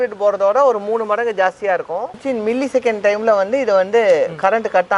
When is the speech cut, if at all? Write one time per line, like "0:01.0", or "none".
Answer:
0:02.1